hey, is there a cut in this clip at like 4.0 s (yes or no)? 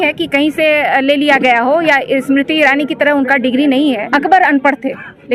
yes